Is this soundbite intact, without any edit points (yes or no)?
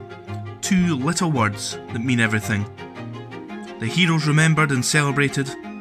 yes